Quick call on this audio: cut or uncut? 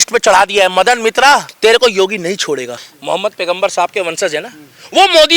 cut